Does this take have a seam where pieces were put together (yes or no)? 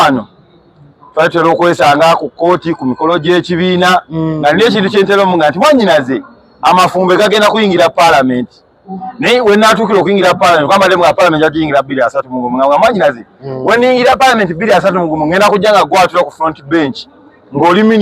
no